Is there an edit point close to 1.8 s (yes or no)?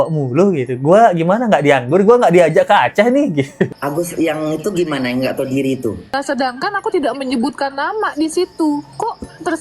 no